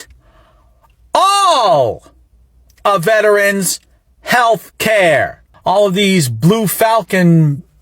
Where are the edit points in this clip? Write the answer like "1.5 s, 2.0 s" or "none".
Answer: 5.4 s